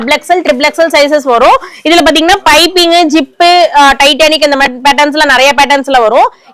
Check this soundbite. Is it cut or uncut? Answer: uncut